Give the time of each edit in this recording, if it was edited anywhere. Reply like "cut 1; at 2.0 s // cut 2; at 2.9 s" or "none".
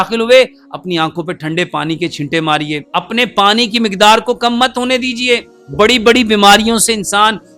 cut 1; at 2.8 s // cut 2; at 5.6 s